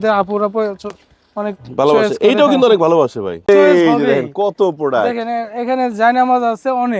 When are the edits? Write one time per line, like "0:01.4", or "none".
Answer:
0:03.5